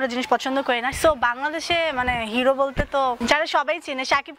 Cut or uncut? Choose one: cut